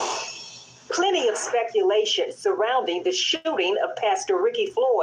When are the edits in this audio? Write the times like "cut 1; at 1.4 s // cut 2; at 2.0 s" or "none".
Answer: cut 1; at 3.3 s

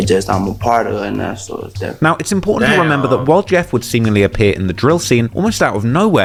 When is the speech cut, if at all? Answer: none

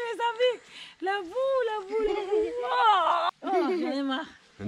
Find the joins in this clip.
cut 1; at 3.3 s

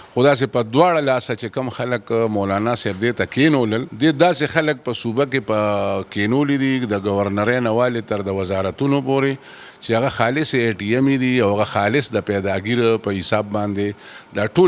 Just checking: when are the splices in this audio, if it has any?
cut 1; at 3.9 s

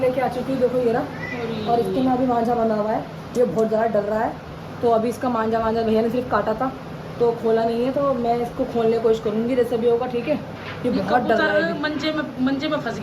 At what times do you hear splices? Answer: none

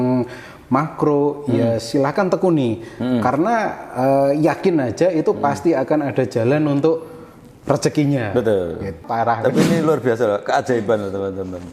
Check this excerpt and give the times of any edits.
cut 1; at 9.0 s

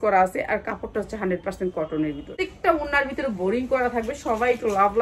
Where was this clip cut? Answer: cut 1; at 2.3 s

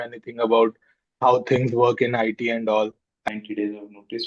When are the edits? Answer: cut 1; at 3.2 s

